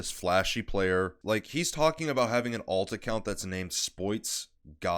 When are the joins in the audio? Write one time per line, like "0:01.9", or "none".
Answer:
0:01.2